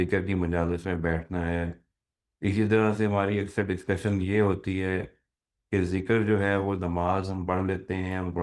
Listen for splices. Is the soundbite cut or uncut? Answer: uncut